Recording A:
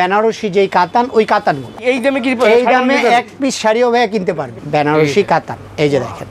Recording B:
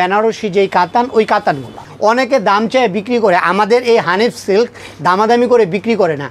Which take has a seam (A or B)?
A